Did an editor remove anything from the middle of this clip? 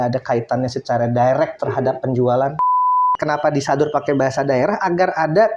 yes; 1 cut; at 3.1 s

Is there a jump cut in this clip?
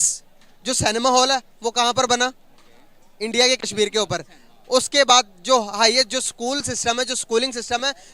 no; 0 cuts

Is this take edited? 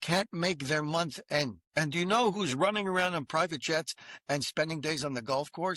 yes; 1 cut; at 1.6 s

